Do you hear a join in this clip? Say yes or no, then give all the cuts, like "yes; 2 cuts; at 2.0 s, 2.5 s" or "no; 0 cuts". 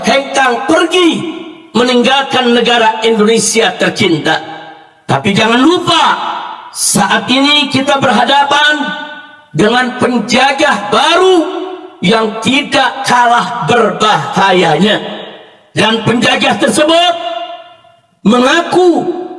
no; 0 cuts